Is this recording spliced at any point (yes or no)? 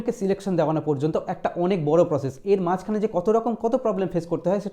no